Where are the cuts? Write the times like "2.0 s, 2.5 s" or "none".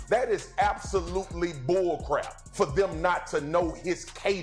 2.4 s